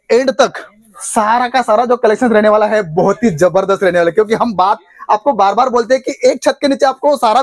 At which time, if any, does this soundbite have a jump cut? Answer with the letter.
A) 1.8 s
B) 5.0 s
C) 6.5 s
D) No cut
D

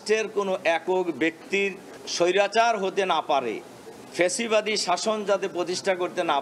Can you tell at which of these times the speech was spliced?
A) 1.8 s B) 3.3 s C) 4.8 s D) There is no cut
D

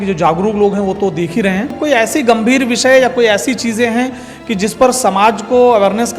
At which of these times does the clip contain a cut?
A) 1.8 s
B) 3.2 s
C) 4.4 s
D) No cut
A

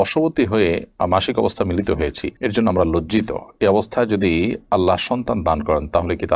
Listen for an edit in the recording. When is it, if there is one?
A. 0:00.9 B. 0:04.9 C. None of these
C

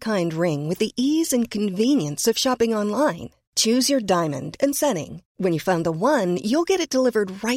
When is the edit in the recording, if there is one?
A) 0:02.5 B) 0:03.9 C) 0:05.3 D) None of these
D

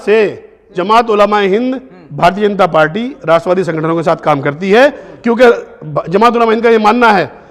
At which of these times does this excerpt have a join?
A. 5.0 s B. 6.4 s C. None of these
C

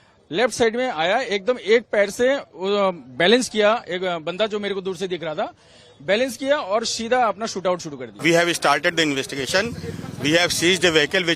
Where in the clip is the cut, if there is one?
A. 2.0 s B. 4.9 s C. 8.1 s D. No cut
C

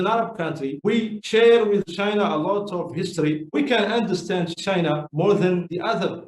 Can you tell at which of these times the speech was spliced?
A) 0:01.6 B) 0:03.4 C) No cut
B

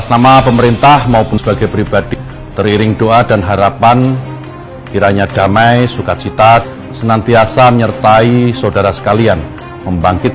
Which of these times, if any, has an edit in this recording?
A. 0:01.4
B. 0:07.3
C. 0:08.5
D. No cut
A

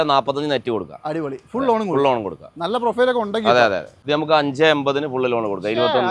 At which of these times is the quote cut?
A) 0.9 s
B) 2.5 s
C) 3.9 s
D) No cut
C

